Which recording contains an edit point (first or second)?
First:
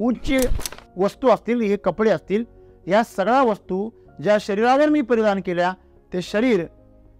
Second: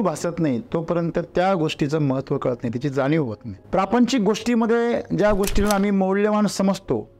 second